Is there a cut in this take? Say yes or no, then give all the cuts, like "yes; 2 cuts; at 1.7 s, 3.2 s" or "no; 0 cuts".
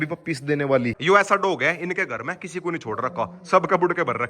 yes; 1 cut; at 1.0 s